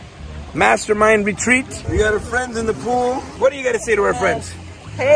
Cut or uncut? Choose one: cut